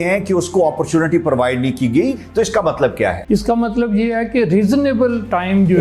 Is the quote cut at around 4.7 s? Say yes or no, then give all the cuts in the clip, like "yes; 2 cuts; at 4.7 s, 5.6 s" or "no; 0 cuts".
no; 2 cuts; at 2.1 s, 3.2 s